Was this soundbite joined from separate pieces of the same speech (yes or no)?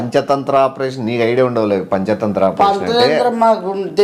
yes